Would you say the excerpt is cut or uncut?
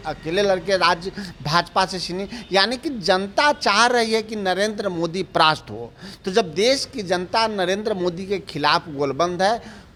uncut